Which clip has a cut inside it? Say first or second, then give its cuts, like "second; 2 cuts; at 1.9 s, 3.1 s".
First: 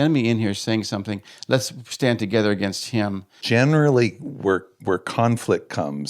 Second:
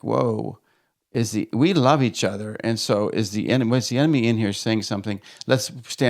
first; 1 cut; at 3.4 s